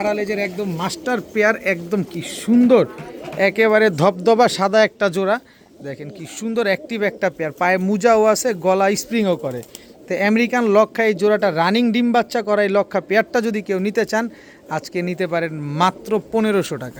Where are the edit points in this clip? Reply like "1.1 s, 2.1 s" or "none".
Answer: none